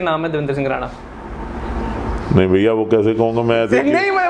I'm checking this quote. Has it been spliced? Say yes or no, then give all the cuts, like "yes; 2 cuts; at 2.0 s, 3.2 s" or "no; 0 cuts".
no; 0 cuts